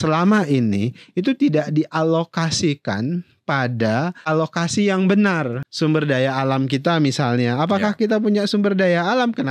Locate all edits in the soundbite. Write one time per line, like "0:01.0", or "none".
0:04.2
0:05.6